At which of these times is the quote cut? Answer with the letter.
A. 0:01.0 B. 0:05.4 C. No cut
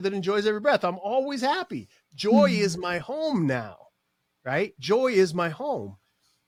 C